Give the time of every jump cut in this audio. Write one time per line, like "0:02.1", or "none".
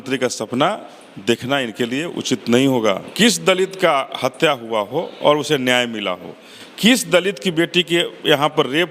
0:03.1